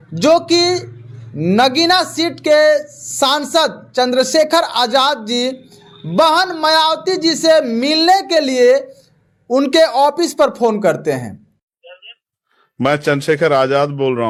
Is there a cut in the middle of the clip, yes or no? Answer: no